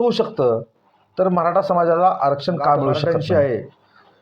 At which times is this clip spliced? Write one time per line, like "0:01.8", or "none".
0:03.0